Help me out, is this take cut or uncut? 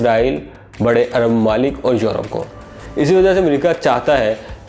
uncut